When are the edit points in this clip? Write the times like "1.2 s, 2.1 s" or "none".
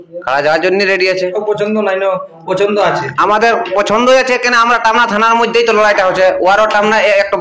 1.4 s